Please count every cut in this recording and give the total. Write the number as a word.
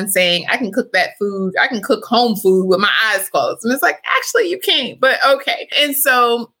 zero